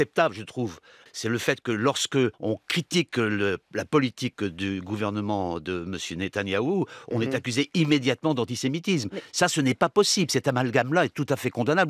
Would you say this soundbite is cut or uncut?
cut